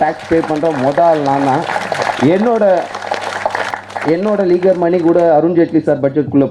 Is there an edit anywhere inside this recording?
yes; 1 cut; at 3.7 s

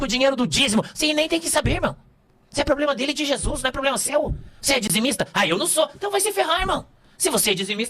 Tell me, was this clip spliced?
yes; 1 cut; at 4.7 s

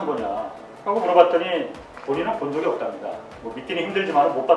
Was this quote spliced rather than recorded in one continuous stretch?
yes; 1 cut; at 1.8 s

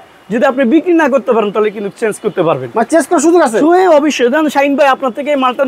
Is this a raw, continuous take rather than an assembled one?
yes; 0 cuts

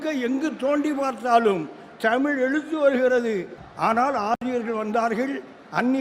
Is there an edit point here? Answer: yes; 1 cut; at 3.6 s

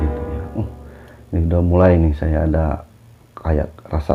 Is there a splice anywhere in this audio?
no; 0 cuts

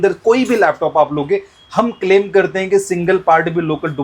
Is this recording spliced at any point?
no; 0 cuts

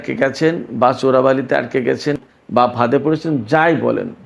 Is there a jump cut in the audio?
yes; 1 cut; at 2.2 s

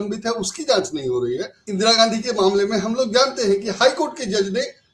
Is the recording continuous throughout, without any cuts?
no; 1 cut; at 1.6 s

